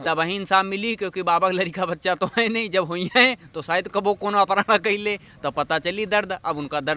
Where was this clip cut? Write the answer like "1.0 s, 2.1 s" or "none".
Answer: none